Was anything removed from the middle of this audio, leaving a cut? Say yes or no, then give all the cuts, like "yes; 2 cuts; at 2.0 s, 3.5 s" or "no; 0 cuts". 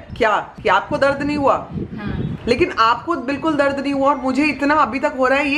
no; 0 cuts